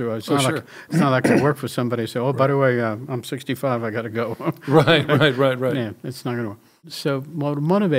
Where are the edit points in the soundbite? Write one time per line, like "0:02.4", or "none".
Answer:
0:06.9